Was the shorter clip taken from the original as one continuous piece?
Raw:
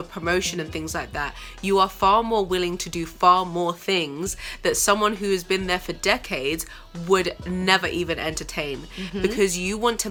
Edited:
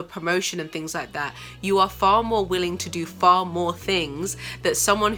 yes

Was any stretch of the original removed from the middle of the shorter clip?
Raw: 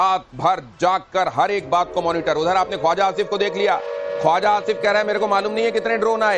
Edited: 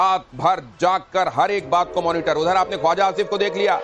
no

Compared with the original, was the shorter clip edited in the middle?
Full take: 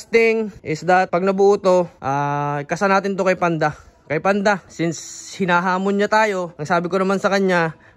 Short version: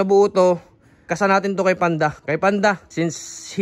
yes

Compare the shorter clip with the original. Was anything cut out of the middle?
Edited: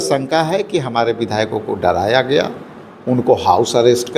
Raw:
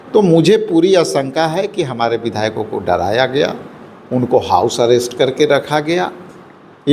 no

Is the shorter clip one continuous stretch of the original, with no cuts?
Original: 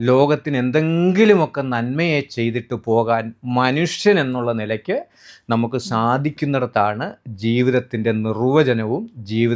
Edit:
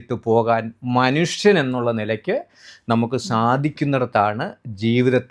yes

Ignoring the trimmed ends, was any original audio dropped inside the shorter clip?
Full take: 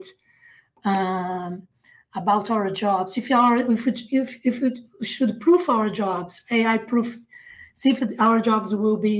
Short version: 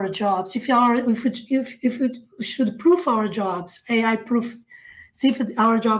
no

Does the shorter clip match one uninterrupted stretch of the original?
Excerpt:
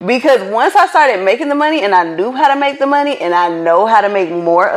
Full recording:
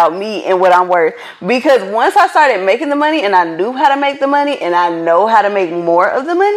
yes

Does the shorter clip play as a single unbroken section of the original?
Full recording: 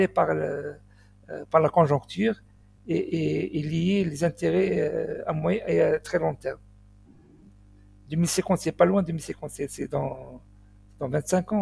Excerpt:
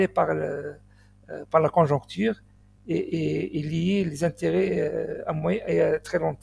yes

